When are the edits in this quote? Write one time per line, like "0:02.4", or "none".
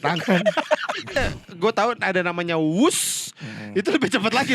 0:01.2